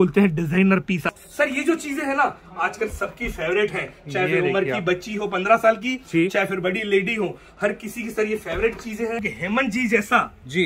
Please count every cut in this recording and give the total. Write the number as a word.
two